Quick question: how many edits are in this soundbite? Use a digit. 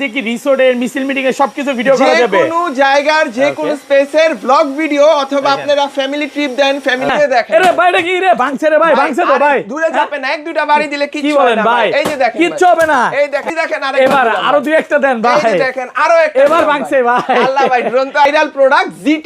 3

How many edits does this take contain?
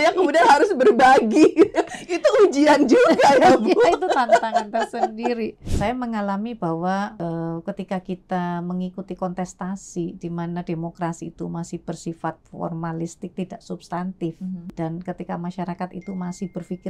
3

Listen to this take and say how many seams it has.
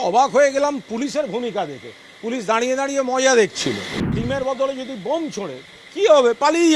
1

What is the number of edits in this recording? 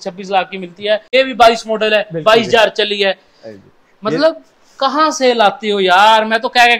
1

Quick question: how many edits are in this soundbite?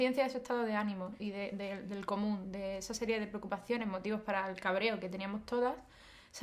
1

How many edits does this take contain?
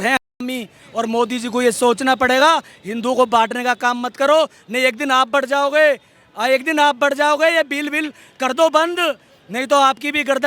0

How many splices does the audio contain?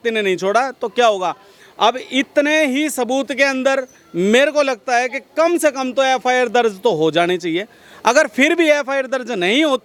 0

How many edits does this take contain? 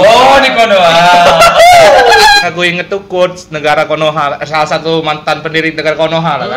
1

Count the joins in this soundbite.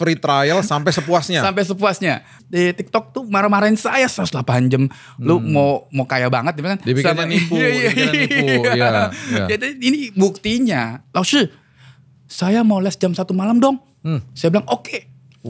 2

